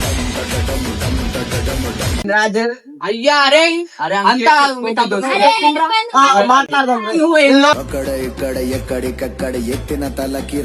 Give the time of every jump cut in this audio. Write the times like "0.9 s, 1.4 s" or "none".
none